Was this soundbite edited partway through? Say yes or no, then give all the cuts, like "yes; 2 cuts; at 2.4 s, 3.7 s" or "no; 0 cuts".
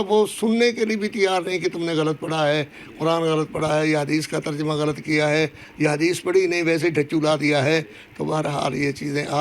no; 0 cuts